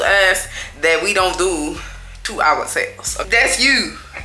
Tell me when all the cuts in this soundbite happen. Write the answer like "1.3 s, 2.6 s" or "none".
none